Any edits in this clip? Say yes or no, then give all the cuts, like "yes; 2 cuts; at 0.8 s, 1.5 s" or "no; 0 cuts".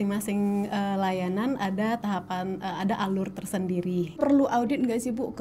yes; 1 cut; at 4.2 s